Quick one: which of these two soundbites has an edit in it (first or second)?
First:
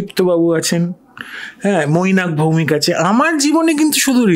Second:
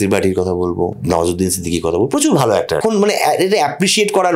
second